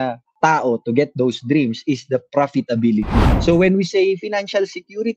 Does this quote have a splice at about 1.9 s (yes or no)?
no